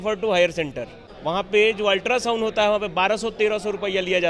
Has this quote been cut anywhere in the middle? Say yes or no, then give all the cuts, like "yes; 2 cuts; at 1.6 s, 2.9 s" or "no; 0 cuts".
yes; 1 cut; at 1.1 s